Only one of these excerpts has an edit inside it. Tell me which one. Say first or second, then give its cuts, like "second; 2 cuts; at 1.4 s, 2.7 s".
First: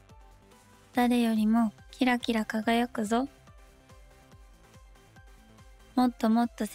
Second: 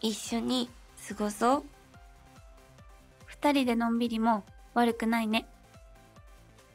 first; 3 cuts; at 1.0 s, 3.4 s, 5.9 s